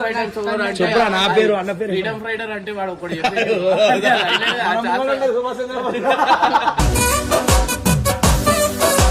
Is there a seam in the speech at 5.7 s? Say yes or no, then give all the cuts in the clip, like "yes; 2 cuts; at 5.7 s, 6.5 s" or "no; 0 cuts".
no; 0 cuts